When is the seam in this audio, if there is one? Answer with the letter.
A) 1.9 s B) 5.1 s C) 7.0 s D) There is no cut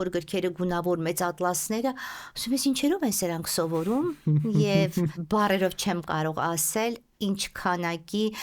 B